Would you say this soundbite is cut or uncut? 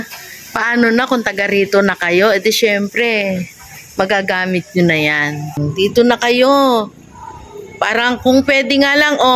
cut